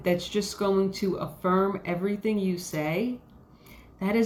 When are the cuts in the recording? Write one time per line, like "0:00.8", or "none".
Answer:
none